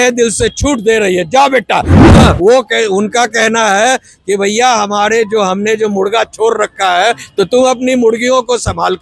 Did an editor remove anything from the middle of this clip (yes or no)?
yes